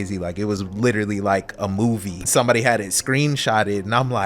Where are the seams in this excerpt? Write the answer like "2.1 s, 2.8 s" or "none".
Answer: 2.2 s